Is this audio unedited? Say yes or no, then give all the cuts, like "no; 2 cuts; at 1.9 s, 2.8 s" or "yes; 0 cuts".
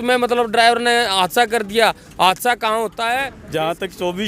no; 1 cut; at 3.4 s